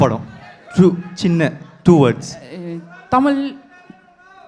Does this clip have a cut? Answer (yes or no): no